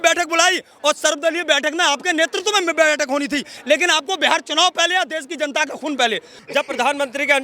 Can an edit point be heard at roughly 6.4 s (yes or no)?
yes